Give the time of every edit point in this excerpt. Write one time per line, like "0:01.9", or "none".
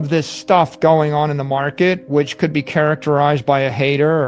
none